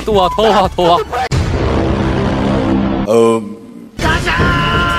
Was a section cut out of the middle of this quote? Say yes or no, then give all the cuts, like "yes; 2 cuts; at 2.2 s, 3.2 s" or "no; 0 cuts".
no; 0 cuts